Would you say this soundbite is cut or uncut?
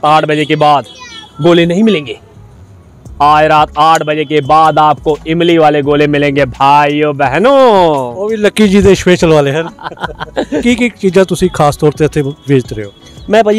cut